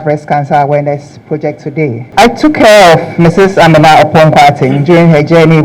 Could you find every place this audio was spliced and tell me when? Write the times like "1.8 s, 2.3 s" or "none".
2.0 s